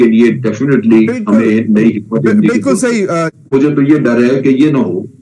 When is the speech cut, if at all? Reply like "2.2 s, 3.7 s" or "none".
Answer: 3.5 s